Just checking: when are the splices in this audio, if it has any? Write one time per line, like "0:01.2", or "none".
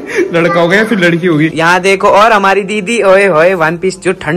0:01.5